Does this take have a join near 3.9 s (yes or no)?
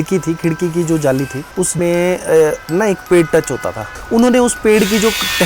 yes